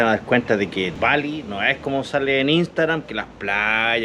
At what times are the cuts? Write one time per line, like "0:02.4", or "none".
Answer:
0:00.9

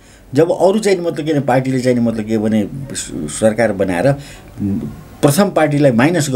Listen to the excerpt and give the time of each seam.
none

